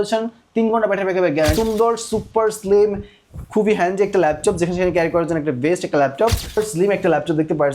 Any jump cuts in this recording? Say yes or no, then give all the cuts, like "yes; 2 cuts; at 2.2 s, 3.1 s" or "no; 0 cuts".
yes; 2 cuts; at 1.5 s, 6.6 s